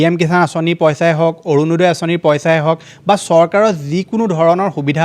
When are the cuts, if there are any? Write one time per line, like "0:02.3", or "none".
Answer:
none